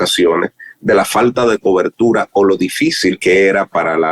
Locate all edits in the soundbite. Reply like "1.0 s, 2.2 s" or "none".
3.2 s